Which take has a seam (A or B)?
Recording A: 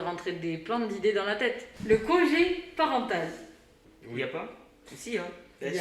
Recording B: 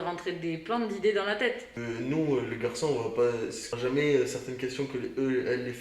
B